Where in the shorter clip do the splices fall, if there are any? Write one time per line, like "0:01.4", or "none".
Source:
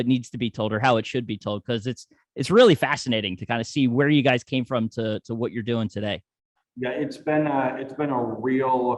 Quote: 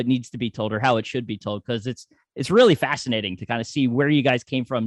none

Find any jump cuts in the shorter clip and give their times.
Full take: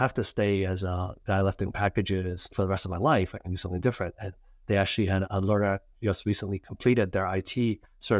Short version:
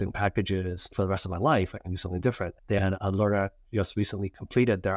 0:02.8

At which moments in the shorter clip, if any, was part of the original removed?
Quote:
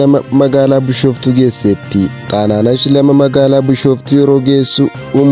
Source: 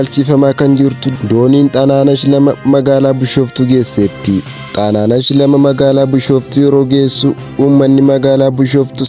0:02.2

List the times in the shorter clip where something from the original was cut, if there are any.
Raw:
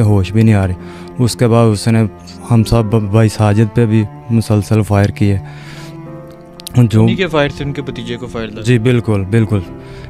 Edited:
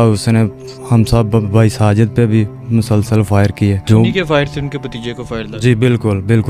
0:03.9

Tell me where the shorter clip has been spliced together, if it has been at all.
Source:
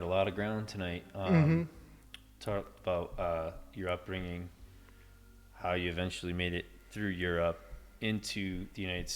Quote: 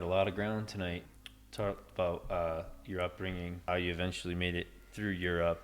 0:01.0
0:03.7

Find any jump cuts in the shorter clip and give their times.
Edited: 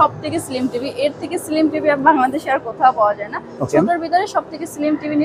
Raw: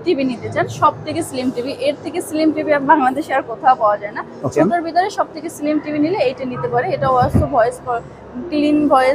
none

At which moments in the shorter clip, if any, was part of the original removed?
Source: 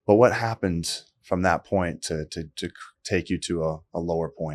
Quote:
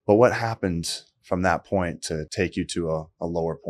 0:02.3

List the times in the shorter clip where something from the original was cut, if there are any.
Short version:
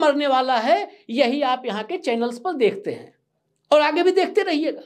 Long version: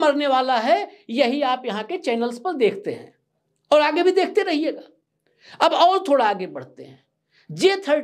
none

